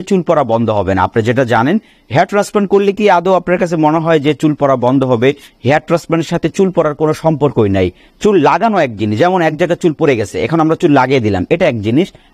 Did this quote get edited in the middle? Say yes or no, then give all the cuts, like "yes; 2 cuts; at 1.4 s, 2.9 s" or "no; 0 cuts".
no; 0 cuts